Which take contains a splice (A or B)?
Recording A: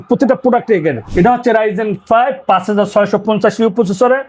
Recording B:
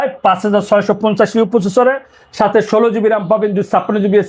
A